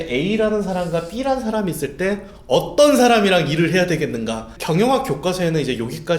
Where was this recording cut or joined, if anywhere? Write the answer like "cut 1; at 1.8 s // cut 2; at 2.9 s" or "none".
cut 1; at 4.5 s